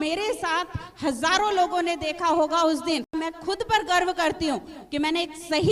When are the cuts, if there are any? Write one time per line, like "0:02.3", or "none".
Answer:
0:03.1